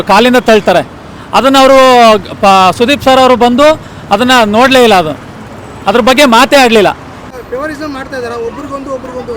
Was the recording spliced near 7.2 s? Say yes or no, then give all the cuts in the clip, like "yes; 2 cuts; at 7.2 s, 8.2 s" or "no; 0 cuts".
yes; 1 cut; at 7.2 s